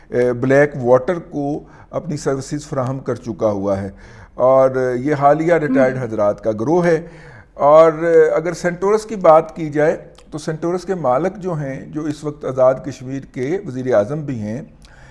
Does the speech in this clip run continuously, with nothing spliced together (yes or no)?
yes